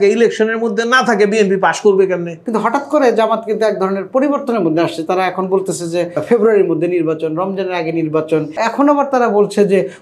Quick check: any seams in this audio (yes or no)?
yes